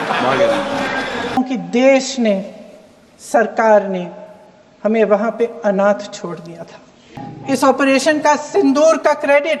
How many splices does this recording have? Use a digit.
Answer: 2